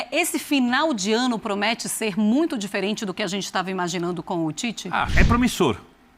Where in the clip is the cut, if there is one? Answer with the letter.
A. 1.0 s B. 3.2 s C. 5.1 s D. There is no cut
C